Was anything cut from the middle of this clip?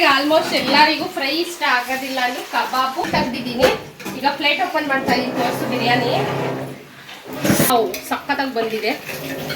yes; 2 cuts; at 3.0 s, 7.7 s

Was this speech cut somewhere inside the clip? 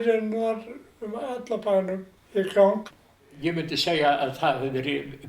yes; 2 cuts; at 2.1 s, 2.9 s

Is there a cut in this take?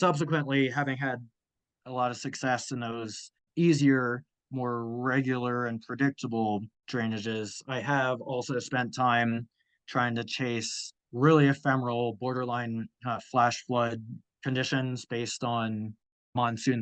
no; 0 cuts

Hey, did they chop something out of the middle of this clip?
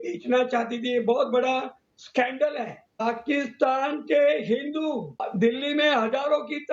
yes; 2 cuts; at 2.8 s, 5.2 s

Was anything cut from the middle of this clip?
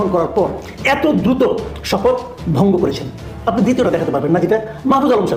no; 0 cuts

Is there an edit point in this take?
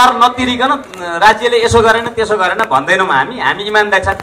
no; 0 cuts

